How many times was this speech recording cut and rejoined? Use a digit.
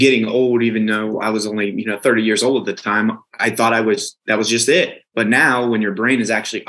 3